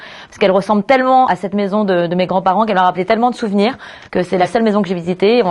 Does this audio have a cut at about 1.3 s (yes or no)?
yes